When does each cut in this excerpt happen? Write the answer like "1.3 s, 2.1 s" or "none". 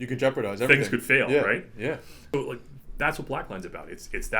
2.1 s